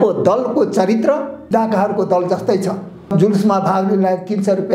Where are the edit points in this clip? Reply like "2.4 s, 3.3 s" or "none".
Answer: 1.5 s, 3.1 s